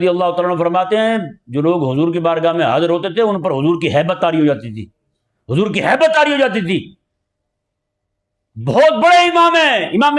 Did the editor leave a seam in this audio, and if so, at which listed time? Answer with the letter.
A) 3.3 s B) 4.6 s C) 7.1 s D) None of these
D